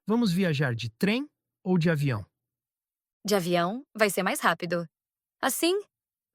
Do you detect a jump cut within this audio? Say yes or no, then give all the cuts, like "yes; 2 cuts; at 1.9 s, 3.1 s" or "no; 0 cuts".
yes; 1 cut; at 3.1 s